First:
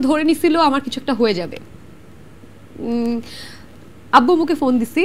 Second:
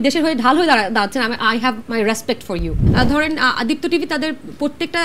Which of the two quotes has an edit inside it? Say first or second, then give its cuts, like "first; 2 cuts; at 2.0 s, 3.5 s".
second; 1 cut; at 2.8 s